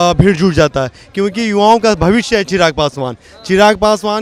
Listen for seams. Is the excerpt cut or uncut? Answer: uncut